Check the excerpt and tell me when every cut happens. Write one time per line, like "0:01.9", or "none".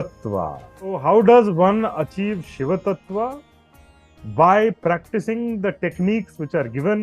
0:01.0